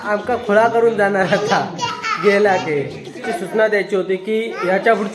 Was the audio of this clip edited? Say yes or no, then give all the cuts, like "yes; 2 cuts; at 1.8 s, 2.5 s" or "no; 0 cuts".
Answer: yes; 1 cut; at 3.3 s